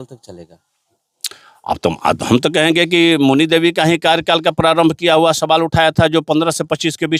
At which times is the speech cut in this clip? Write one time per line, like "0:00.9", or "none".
none